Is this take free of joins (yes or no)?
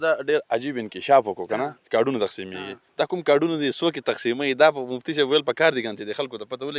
yes